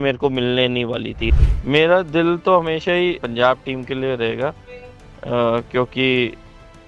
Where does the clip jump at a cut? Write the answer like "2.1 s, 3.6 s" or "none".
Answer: 1.3 s, 3.2 s